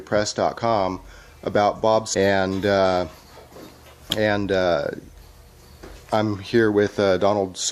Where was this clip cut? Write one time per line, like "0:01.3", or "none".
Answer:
none